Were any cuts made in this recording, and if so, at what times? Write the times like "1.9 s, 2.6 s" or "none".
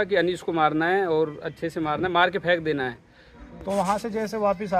3.3 s